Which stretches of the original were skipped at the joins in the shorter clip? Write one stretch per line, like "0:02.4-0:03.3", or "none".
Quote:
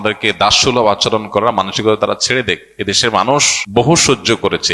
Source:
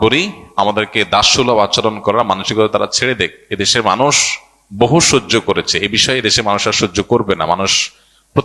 0:04.3-0:04.6